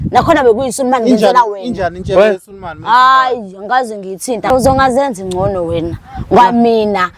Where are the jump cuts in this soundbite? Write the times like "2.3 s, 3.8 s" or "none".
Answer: 4.5 s